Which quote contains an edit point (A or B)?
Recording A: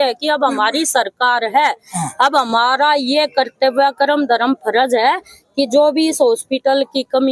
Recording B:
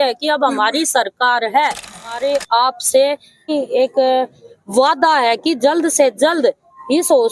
B